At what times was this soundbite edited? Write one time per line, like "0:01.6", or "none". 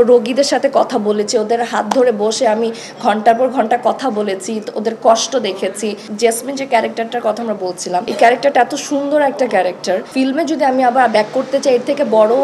0:06.1
0:08.1
0:10.1

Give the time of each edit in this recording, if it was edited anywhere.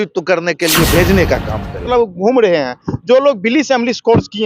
0:01.8

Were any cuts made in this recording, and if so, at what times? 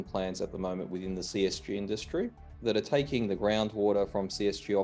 none

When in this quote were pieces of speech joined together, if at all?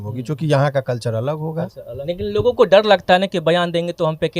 0:01.9

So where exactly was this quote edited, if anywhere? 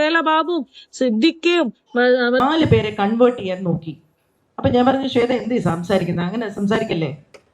0:02.4

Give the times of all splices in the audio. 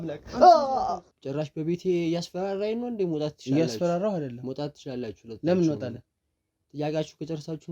0:01.1

